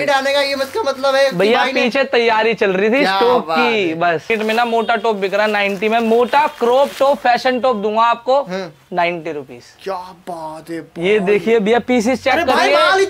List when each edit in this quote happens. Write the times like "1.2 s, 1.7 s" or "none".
4.3 s